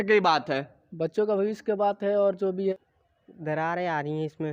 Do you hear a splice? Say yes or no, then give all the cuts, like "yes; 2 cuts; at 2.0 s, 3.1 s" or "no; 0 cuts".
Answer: yes; 1 cut; at 2.7 s